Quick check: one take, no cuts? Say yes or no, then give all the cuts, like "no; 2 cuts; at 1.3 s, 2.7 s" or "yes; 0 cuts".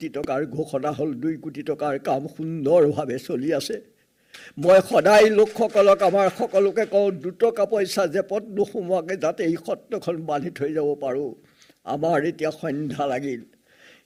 yes; 0 cuts